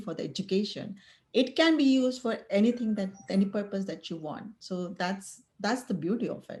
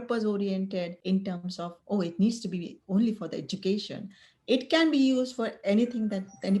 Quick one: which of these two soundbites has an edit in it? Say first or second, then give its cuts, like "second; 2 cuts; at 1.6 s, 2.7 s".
second; 1 cut; at 0.9 s